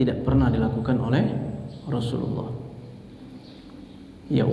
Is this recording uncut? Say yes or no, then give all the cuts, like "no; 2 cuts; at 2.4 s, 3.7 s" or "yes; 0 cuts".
yes; 0 cuts